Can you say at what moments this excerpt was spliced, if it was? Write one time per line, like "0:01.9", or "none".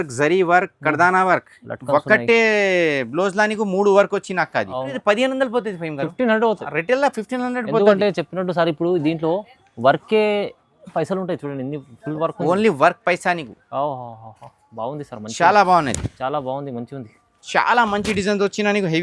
0:05.0
0:17.4